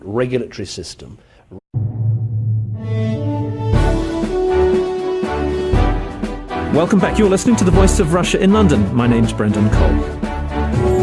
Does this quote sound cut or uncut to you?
uncut